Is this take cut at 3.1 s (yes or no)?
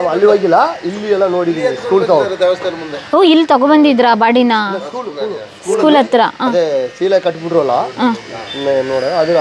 no